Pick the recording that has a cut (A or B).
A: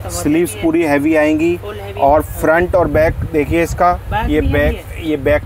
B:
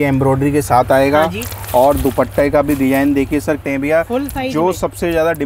B